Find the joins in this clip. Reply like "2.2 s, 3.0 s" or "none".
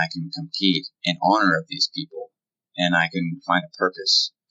0.9 s